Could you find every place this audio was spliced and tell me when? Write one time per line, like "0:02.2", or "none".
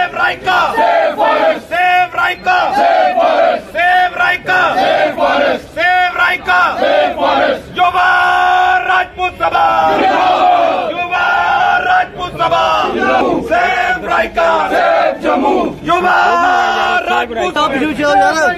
0:13.2